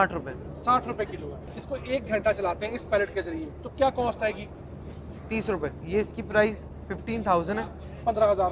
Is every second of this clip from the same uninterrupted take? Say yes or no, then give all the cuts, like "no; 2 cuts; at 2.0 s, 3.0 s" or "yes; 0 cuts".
no; 2 cuts; at 1.5 s, 5.8 s